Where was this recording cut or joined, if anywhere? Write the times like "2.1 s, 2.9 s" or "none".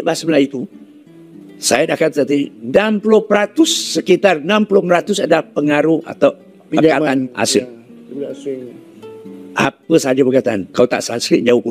none